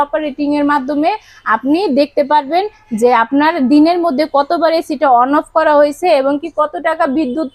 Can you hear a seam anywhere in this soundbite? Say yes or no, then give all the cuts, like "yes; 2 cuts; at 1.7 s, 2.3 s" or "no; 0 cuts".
no; 0 cuts